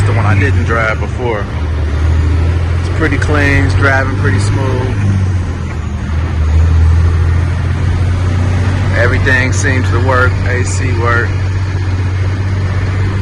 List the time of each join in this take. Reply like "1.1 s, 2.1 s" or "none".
none